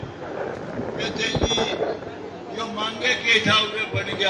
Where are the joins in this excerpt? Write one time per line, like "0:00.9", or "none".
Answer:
none